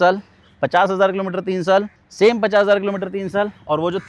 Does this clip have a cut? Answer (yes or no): no